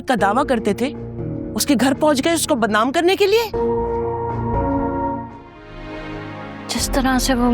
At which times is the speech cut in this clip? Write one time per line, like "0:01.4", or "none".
0:05.5